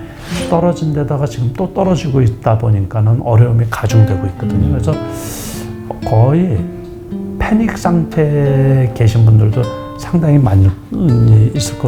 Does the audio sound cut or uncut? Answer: uncut